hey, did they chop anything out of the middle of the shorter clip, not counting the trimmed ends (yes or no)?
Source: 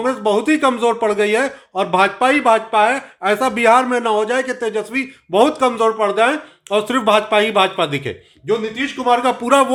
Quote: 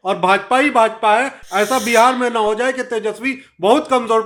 no